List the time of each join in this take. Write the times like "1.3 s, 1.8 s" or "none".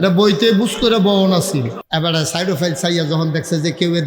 1.8 s